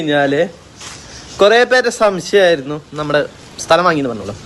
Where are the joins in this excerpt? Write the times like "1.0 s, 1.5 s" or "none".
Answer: none